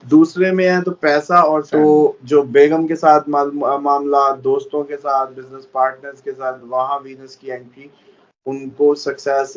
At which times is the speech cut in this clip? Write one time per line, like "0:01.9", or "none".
0:01.7